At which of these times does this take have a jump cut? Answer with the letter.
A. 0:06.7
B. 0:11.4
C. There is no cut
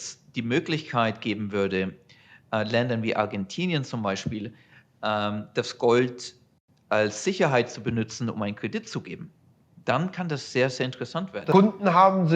B